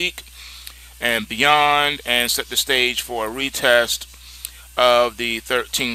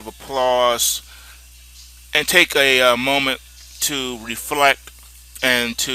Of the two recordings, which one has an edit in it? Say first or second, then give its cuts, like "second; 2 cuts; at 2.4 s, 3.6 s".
second; 1 cut; at 3.0 s